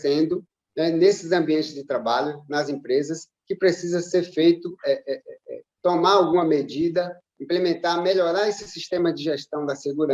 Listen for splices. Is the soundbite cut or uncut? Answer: uncut